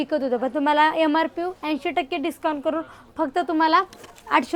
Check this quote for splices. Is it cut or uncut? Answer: uncut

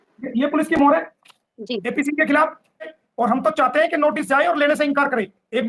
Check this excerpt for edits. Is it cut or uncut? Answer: cut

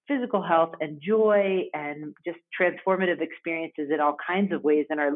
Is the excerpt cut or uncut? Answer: uncut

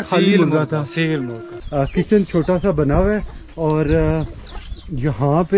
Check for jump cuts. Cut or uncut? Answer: cut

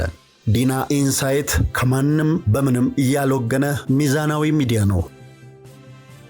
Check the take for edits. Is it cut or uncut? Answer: cut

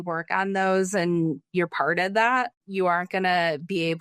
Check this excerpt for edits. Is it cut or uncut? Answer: uncut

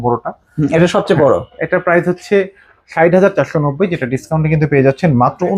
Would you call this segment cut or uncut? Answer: uncut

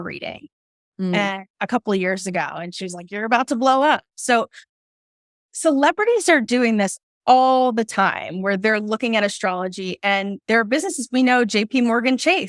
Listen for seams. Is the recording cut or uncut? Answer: uncut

